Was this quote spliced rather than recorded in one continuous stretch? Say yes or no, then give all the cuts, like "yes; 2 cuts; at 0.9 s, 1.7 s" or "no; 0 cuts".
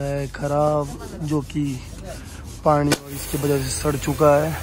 no; 0 cuts